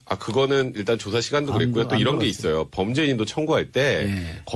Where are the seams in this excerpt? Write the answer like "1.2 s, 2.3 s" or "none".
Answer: none